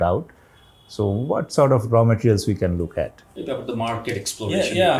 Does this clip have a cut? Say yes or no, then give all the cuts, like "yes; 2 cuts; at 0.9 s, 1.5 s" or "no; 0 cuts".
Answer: no; 0 cuts